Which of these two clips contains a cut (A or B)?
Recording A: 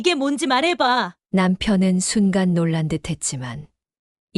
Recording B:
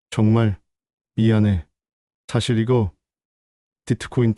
A